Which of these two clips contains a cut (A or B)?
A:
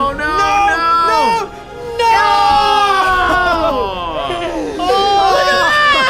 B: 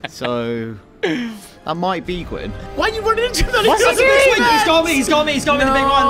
B